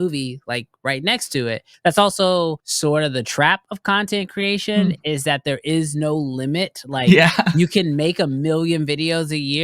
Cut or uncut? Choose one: cut